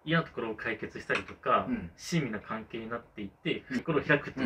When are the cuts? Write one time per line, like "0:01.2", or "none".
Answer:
none